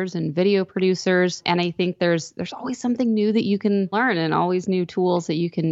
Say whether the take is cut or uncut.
cut